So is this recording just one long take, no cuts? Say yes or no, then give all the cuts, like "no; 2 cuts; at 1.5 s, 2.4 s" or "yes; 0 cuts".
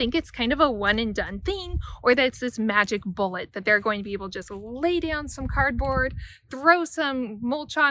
yes; 0 cuts